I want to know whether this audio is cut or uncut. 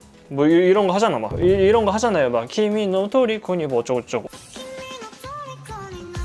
cut